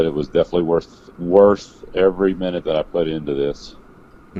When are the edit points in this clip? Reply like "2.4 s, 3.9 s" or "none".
none